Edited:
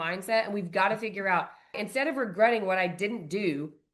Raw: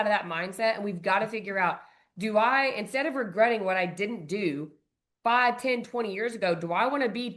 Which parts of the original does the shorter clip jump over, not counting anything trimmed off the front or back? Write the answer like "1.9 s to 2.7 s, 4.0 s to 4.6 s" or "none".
2.1 s to 2.8 s